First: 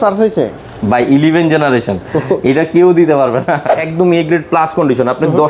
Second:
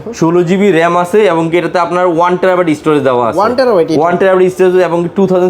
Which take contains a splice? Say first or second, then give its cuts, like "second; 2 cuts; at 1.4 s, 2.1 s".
first; 1 cut; at 3.8 s